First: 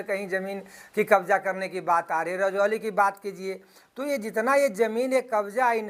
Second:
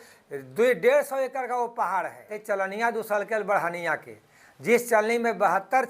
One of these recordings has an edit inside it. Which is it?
second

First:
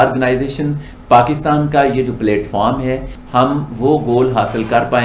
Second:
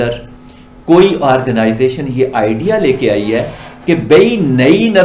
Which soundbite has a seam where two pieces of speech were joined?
first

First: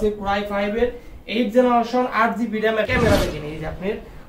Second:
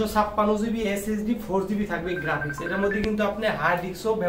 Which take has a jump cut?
first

